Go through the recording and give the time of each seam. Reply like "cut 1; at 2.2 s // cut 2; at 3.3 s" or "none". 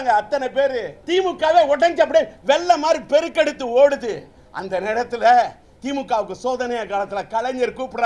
cut 1; at 0.9 s